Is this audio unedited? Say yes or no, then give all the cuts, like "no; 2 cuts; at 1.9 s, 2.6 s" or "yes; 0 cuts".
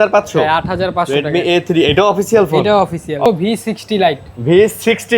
no; 1 cut; at 3.3 s